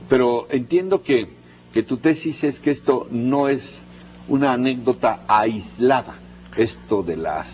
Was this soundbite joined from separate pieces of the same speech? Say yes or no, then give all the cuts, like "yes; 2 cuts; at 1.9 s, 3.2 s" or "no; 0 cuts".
yes; 1 cut; at 2.0 s